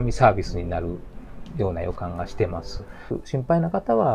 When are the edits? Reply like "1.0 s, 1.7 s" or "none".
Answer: 3.1 s